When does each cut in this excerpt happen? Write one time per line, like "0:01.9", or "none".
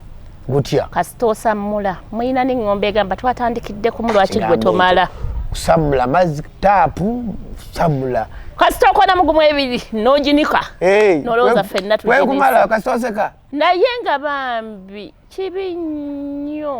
0:13.4